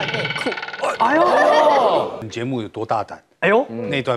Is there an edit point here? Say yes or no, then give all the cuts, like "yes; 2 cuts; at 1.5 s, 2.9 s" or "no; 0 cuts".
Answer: yes; 1 cut; at 2.2 s